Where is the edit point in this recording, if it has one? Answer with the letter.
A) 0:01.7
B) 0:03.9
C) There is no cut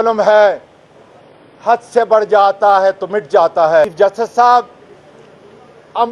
B